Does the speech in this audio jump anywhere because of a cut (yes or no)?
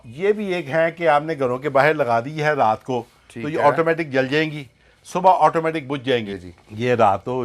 yes